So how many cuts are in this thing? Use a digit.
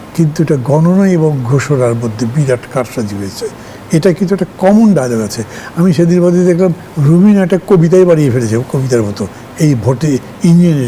0